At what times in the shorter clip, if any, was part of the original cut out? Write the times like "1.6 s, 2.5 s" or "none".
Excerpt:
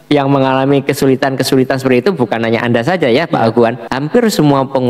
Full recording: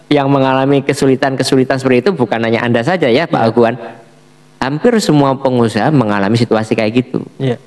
3.9 s

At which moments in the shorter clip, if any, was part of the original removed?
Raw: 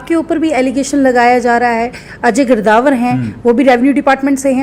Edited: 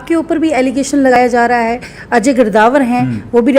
1.2 s

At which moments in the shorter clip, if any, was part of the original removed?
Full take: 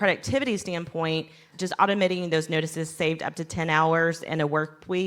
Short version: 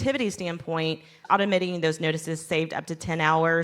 1.1 s

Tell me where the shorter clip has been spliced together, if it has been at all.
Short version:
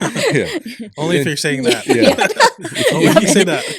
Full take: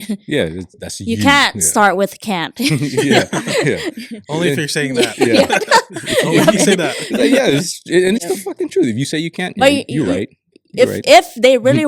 none

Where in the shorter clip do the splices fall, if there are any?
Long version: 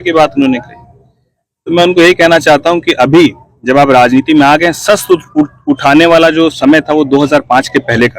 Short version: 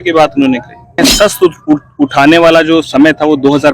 1.1 s

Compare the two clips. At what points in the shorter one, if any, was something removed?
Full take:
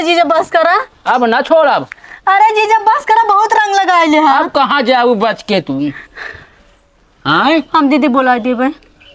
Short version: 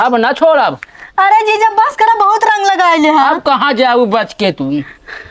none

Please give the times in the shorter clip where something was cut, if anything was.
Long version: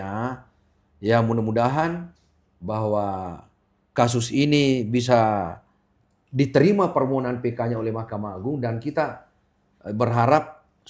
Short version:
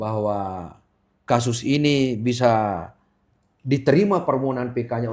none

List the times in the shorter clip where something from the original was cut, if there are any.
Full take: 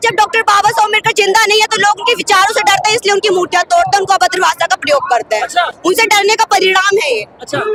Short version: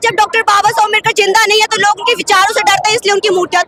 none

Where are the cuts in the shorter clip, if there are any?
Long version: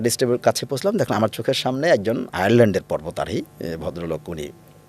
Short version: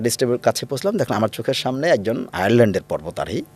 none

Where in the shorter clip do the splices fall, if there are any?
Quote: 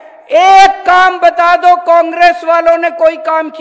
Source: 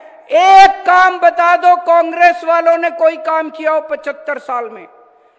none

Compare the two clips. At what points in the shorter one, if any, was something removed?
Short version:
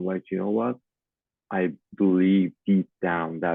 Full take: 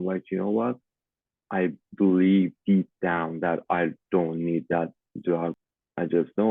none

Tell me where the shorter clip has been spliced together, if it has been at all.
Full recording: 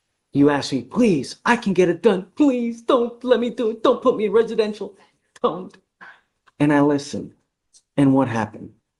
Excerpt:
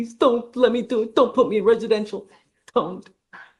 none

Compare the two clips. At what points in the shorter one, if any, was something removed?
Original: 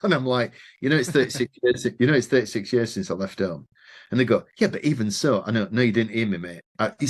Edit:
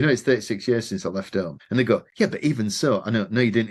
1.6 s

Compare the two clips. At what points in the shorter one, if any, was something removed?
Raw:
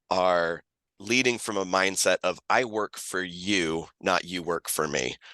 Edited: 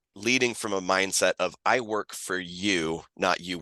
none

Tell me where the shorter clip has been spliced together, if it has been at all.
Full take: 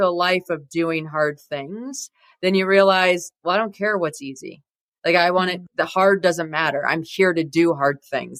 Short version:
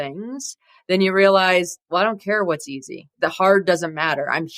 3.1 s

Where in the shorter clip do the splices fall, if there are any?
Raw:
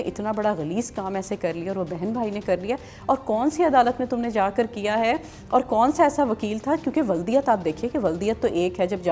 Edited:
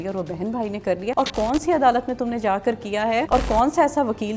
1.1 s, 3.3 s

